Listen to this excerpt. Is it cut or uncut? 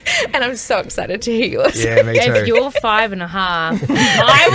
uncut